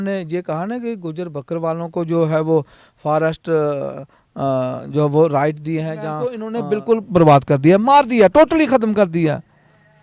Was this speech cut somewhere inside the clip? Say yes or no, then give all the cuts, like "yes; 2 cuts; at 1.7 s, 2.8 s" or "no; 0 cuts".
yes; 1 cut; at 6.4 s